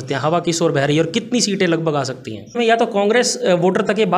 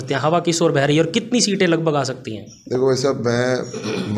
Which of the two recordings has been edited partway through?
first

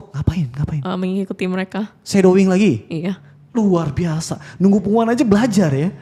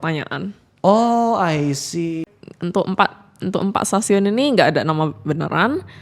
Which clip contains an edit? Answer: second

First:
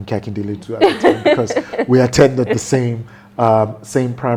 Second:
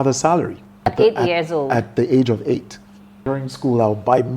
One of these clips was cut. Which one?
second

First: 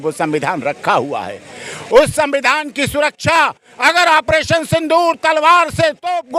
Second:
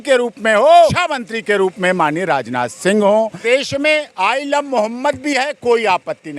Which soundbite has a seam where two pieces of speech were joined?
second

